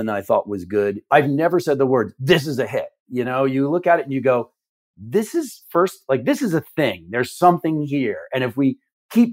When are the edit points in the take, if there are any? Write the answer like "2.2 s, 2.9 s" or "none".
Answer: 1.0 s